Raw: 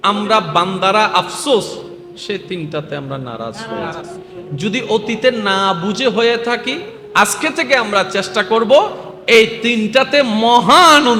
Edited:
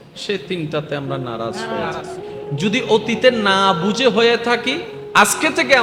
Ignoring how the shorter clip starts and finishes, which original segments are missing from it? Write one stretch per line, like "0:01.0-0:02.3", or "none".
none